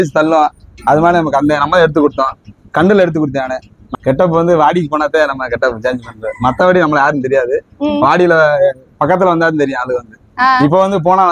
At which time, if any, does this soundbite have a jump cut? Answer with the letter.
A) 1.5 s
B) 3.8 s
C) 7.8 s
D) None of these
B